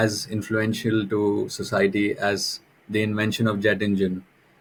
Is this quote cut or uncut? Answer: uncut